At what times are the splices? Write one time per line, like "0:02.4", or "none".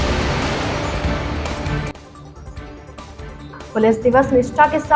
0:03.5